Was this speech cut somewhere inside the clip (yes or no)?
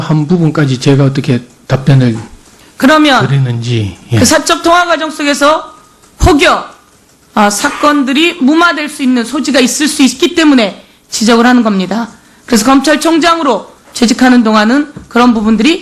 no